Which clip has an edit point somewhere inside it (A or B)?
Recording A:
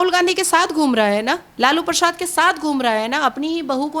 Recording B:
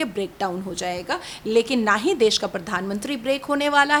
A